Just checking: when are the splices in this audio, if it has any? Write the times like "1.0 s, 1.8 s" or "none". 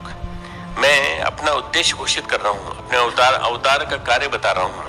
none